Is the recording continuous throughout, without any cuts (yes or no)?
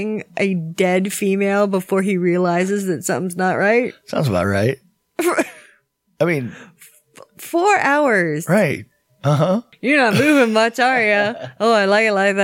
no